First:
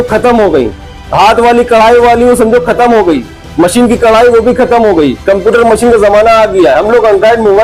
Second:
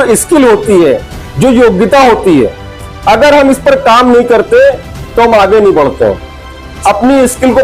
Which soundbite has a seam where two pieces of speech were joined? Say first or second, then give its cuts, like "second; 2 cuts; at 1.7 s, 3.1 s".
second; 1 cut; at 6.7 s